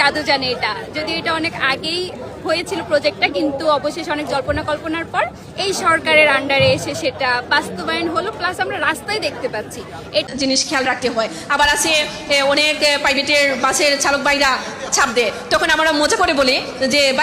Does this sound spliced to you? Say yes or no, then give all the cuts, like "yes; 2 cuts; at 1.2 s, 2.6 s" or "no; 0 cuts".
yes; 1 cut; at 10.2 s